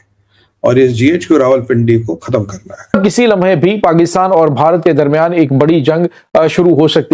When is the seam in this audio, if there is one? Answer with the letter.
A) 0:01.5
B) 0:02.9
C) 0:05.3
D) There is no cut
B